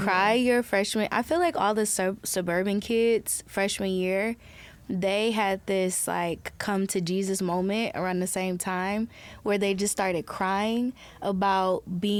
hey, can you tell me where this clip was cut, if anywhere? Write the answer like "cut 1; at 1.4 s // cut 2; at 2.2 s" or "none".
none